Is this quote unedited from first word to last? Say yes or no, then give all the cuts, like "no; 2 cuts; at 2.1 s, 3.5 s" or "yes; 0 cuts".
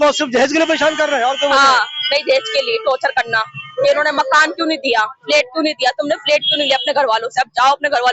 yes; 0 cuts